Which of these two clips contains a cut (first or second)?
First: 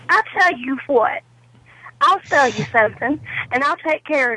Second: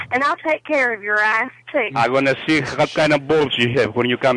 second